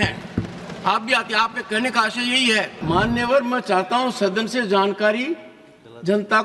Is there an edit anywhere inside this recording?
yes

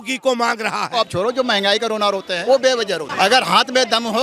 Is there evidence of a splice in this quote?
yes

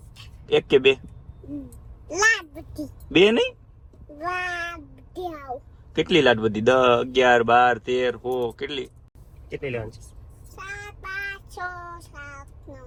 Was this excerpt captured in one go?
yes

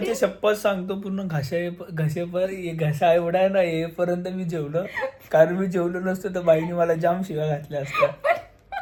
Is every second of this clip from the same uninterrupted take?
yes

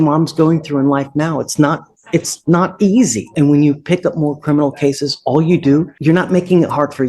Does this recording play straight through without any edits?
no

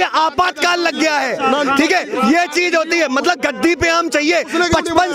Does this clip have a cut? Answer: no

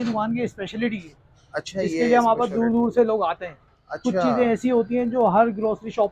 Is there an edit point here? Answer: no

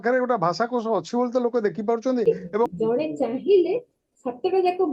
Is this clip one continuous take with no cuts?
no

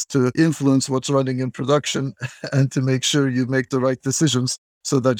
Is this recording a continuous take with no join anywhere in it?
yes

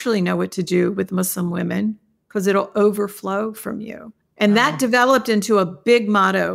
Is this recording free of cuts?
yes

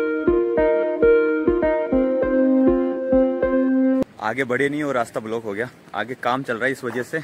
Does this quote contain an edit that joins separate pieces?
no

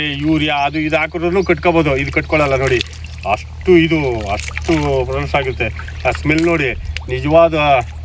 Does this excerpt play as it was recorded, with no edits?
yes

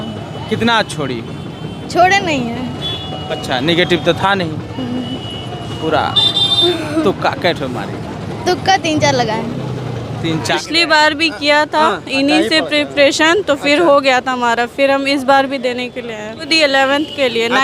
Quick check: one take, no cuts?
no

